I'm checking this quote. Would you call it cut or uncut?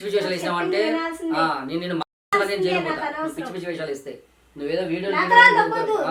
uncut